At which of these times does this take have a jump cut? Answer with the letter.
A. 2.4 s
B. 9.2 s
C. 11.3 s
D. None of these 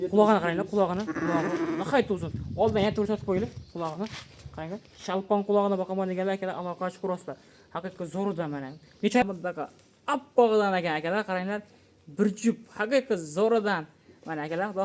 B